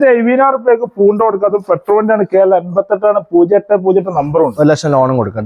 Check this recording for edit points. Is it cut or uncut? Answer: uncut